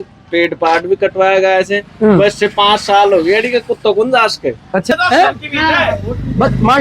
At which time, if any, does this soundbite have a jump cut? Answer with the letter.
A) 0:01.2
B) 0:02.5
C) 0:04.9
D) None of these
C